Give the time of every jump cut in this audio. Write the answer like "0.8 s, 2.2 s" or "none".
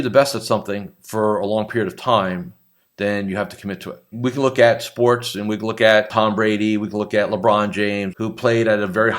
4.1 s, 6.1 s, 8.1 s